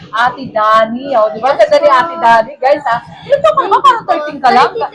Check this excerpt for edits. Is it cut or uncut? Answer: uncut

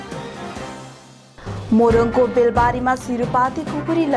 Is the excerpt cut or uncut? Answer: cut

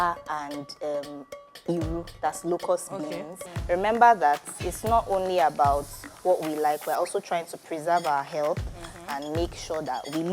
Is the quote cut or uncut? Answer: cut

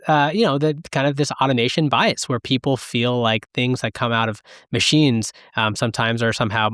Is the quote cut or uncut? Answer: uncut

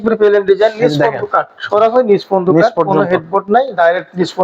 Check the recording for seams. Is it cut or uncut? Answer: uncut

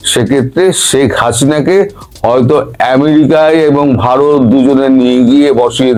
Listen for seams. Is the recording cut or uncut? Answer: uncut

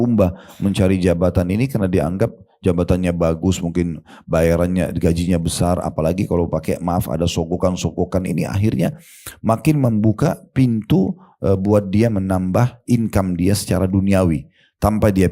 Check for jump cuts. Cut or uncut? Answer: uncut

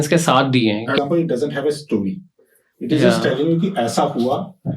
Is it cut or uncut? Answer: cut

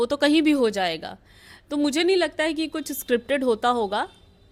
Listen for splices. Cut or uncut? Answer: uncut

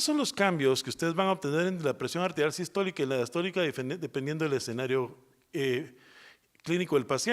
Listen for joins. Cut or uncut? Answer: cut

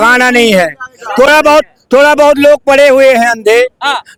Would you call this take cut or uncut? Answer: uncut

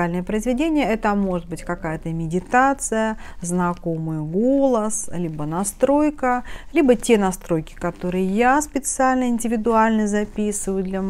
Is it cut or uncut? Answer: uncut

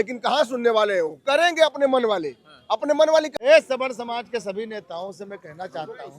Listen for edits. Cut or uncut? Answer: cut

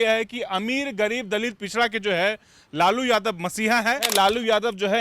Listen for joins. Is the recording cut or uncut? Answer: cut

